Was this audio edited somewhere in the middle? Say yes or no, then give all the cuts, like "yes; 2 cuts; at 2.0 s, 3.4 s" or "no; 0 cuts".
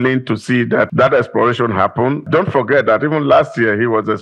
yes; 2 cuts; at 0.9 s, 2.3 s